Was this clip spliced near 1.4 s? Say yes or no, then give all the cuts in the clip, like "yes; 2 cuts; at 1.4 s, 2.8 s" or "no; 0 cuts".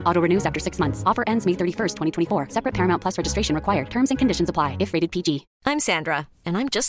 no; 1 cut; at 5.5 s